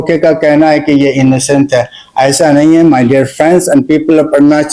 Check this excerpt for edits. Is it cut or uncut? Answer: uncut